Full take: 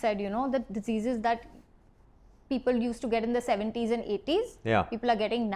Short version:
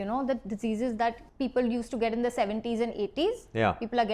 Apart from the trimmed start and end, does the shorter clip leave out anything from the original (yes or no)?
yes